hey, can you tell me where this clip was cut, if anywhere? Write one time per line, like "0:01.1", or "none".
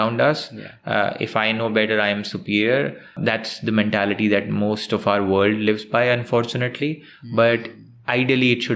0:03.2